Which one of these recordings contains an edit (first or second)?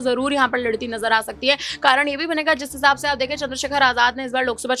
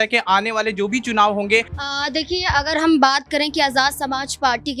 second